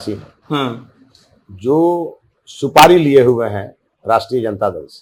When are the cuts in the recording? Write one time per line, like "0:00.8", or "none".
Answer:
none